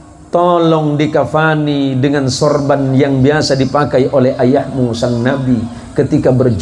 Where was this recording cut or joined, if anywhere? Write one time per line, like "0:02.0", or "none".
none